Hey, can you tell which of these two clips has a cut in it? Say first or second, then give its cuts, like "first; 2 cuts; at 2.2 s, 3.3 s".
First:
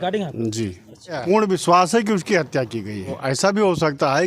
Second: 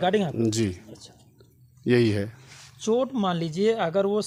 first; 2 cuts; at 1.2 s, 3.2 s